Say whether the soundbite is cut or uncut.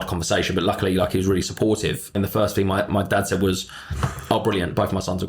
cut